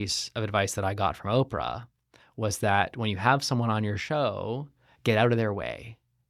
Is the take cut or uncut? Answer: uncut